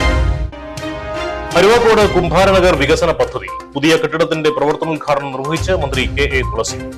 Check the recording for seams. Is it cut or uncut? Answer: uncut